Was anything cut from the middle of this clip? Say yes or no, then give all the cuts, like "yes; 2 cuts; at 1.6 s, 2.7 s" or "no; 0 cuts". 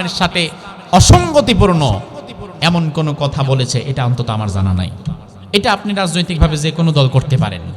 yes; 1 cut; at 5.3 s